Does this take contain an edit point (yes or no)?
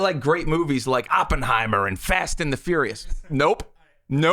no